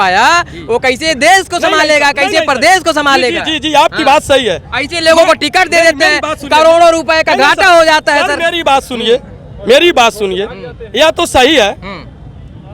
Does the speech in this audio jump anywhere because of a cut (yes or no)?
no